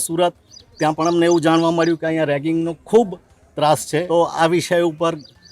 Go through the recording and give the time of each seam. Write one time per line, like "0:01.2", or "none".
0:04.0